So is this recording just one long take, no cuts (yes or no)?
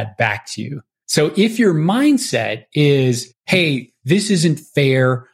yes